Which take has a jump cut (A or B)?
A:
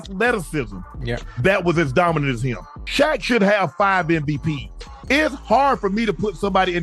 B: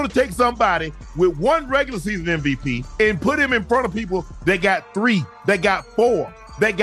A